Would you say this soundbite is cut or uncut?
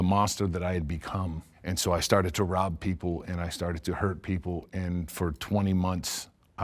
cut